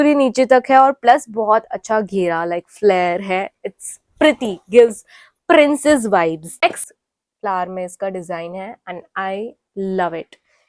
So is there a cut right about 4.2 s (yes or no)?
no